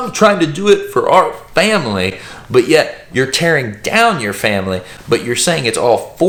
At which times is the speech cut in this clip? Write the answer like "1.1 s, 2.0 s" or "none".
none